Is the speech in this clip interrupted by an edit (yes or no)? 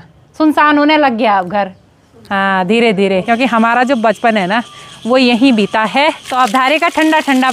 yes